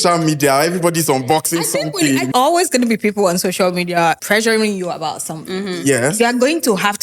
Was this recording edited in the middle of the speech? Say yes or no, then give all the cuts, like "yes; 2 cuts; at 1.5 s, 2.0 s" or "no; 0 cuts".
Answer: yes; 2 cuts; at 2.3 s, 4.2 s